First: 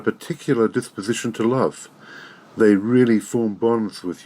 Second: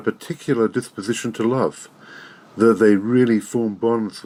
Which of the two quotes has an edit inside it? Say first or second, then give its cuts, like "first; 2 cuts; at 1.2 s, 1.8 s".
first; 1 cut; at 2.6 s